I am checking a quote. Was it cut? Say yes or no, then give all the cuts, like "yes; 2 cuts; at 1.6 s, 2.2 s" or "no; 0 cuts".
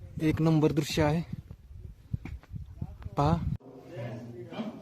yes; 1 cut; at 3.6 s